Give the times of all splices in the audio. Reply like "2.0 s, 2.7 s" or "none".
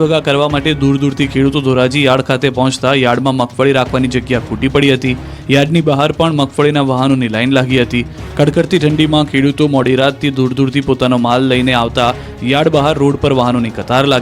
8.2 s